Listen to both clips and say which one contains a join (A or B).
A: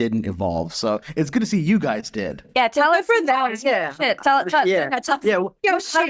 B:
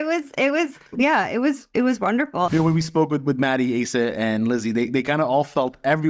B